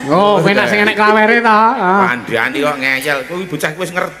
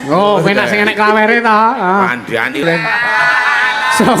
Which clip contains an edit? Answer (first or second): second